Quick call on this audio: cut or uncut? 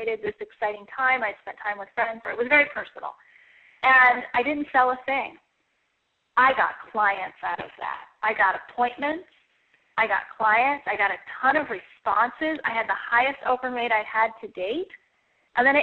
cut